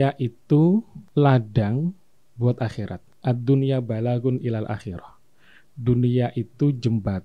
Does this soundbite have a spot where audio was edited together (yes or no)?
yes